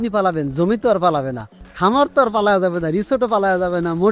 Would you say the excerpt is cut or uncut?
uncut